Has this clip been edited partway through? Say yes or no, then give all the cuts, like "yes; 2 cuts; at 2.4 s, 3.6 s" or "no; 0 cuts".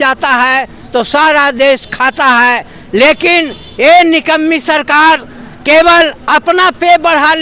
no; 0 cuts